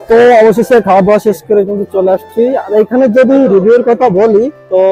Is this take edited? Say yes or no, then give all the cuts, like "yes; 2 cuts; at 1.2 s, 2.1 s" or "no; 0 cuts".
no; 0 cuts